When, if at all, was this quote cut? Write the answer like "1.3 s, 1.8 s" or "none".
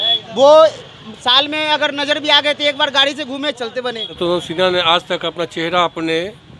4.1 s